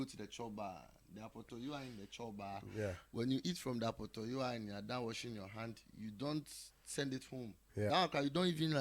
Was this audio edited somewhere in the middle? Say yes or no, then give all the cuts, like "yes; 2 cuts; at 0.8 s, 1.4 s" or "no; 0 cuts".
yes; 1 cut; at 7.9 s